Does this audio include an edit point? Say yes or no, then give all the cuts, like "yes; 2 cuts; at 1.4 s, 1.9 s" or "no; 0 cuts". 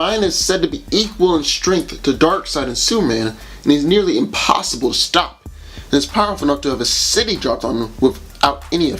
yes; 1 cut; at 7.8 s